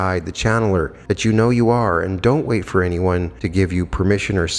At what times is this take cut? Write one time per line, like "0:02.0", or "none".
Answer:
0:01.0
0:03.4